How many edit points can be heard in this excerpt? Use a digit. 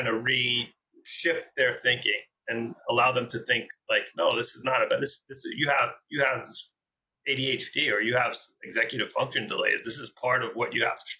0